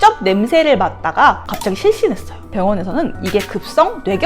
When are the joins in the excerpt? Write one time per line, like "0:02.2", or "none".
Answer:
0:02.5